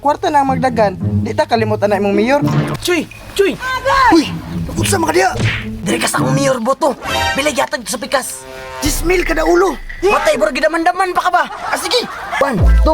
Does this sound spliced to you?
yes; 1 cut; at 2.8 s

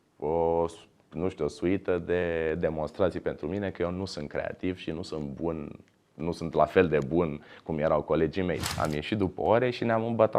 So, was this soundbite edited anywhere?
yes; 1 cut; at 8.7 s

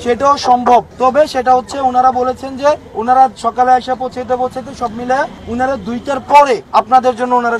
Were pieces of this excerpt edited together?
yes; 4 cuts; at 1.3 s, 2.9 s, 5.4 s, 6.6 s

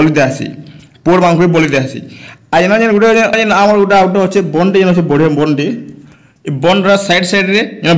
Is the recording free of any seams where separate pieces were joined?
no; 1 cut; at 3.3 s

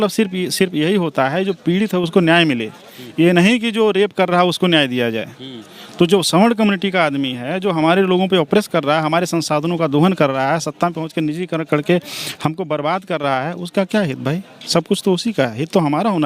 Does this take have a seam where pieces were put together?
no; 0 cuts

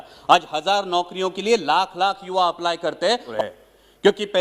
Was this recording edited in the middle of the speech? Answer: yes; 1 cut; at 3.4 s

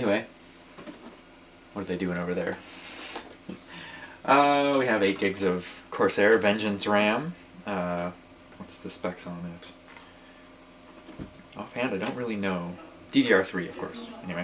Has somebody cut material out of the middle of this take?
yes; 1 cut; at 7.1 s

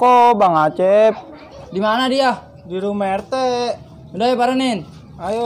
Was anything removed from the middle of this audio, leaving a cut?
no; 0 cuts

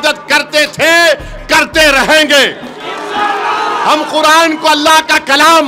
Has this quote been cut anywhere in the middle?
no; 0 cuts

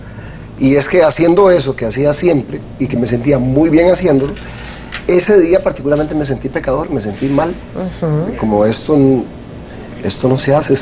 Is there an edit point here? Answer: no; 0 cuts

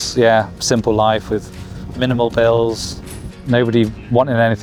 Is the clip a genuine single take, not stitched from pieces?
yes; 0 cuts

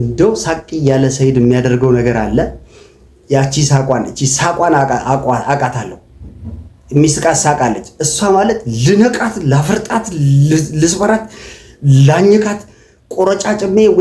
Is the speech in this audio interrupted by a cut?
no; 0 cuts

